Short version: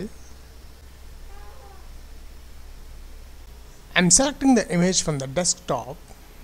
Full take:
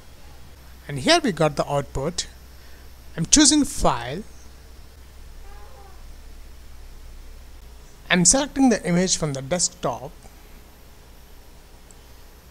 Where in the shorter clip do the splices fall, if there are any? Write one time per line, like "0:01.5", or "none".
none